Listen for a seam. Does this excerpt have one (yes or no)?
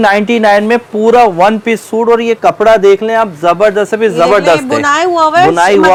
no